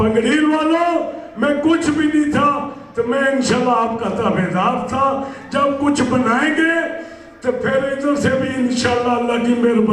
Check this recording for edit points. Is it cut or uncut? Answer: uncut